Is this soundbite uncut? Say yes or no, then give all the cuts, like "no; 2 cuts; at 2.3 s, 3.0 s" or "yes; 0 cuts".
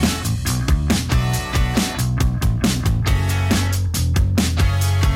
no; 1 cut; at 2.2 s